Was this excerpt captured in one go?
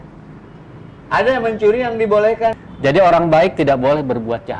no; 1 cut; at 2.6 s

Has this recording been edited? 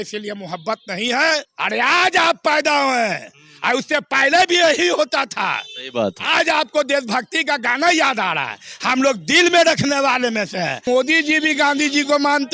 yes; 2 cuts; at 1.5 s, 10.8 s

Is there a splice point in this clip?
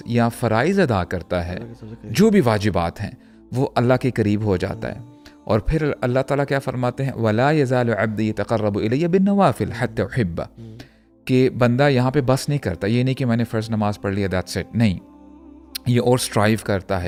no; 0 cuts

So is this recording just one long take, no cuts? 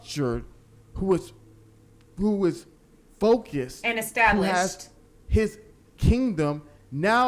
yes; 0 cuts

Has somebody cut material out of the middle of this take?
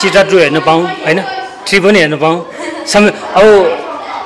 no; 0 cuts

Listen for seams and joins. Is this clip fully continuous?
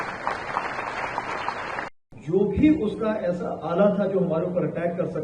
no; 1 cut; at 1.9 s

